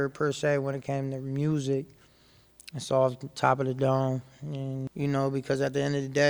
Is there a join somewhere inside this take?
yes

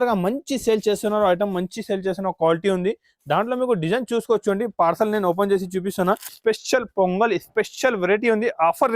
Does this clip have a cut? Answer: yes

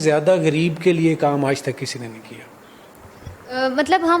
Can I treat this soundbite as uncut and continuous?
yes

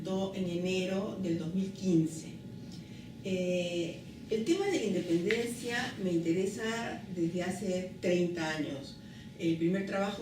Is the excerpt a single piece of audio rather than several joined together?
no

